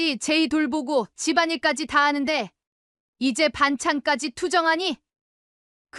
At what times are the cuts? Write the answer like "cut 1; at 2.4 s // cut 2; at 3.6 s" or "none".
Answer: none